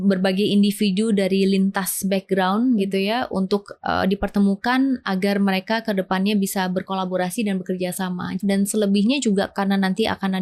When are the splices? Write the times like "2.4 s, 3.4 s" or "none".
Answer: 8.4 s